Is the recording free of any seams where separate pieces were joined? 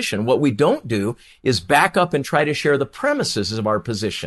yes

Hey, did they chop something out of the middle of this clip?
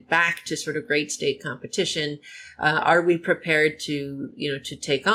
no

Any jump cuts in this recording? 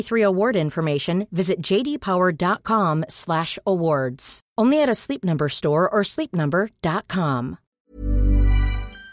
yes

